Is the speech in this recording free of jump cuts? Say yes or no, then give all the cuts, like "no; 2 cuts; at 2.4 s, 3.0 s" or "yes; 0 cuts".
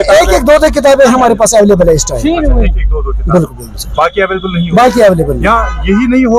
yes; 0 cuts